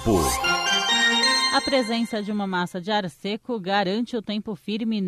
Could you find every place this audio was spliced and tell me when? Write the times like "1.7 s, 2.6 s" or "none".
1.5 s